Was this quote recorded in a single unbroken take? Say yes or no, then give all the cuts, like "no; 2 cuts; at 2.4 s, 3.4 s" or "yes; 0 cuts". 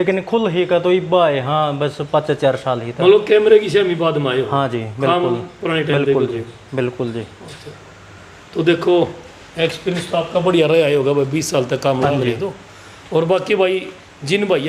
yes; 0 cuts